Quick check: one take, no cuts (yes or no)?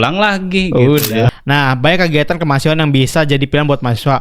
no